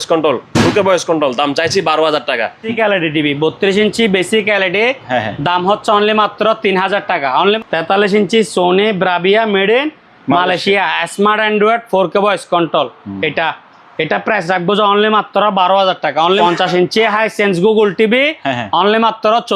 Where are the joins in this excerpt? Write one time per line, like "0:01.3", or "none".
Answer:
0:02.7
0:07.6
0:16.4

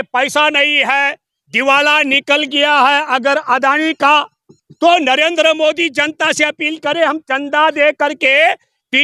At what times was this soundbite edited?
none

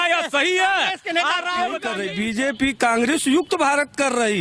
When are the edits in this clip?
0:02.0

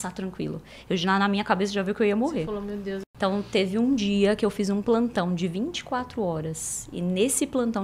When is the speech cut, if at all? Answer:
0:03.0

